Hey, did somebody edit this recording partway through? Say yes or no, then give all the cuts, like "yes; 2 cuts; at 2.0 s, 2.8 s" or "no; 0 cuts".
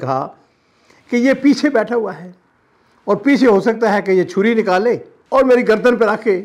no; 0 cuts